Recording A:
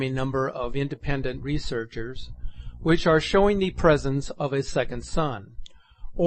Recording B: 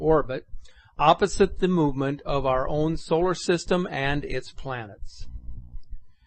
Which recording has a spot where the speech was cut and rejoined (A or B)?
B